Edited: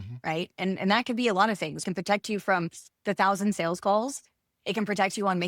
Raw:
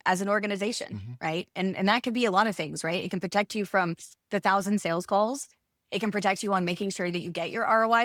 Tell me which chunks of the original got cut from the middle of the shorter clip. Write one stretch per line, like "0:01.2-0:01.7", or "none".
0:02.8-0:03.1